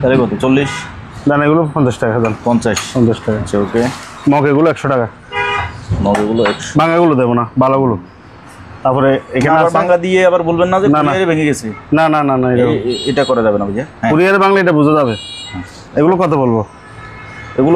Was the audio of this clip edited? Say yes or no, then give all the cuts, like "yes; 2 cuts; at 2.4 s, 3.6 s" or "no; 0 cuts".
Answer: no; 0 cuts